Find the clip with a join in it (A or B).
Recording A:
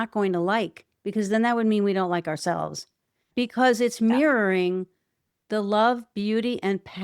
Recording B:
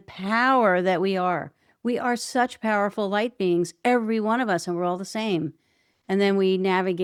A